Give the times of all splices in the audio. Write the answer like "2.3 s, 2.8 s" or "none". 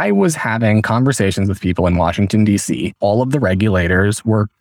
2.9 s